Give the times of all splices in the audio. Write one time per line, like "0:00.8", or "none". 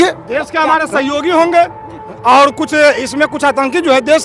none